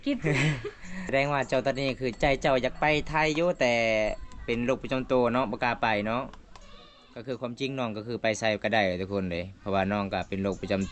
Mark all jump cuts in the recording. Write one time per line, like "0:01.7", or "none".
0:01.1